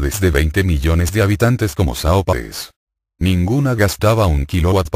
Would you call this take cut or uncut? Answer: uncut